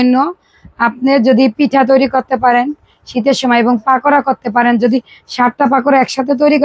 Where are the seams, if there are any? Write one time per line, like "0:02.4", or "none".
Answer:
none